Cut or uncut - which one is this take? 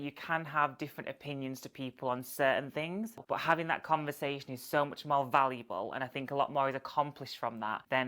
cut